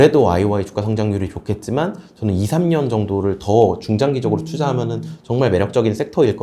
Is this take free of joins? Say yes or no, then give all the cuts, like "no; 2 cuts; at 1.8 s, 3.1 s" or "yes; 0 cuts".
yes; 0 cuts